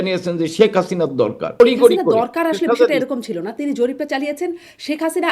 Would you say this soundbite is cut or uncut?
cut